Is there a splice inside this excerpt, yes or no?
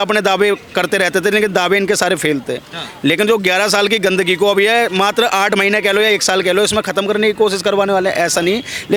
no